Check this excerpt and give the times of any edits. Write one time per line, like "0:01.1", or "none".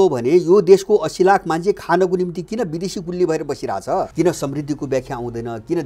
0:04.1